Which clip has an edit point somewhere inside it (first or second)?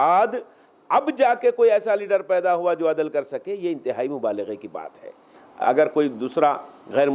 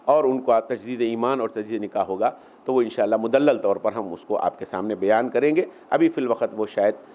first